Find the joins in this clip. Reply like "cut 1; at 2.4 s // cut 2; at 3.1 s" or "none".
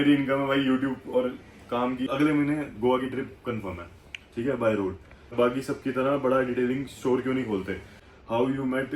cut 1; at 2.1 s // cut 2; at 5.3 s // cut 3; at 8.0 s